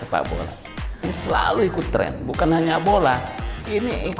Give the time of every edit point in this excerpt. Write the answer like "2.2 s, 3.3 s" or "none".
1.1 s